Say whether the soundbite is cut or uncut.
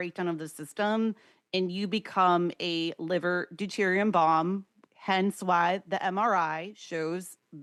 uncut